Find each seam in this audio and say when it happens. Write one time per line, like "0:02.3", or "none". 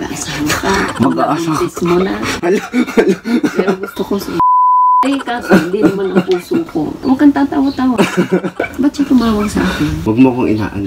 0:05.0
0:07.0
0:10.0